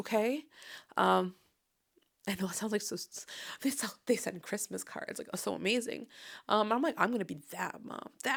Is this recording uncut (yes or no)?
yes